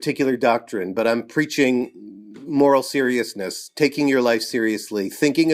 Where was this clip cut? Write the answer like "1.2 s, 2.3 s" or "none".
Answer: none